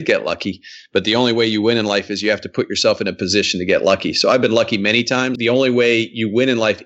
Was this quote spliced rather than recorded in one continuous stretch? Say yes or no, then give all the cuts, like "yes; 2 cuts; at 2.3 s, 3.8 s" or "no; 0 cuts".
yes; 1 cut; at 5.3 s